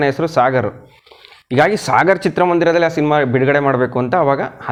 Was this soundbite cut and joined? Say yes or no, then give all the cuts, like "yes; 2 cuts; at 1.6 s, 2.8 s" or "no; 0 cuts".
no; 0 cuts